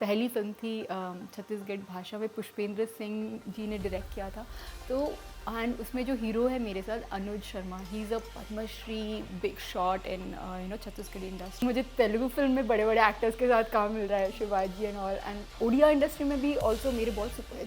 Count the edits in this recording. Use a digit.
1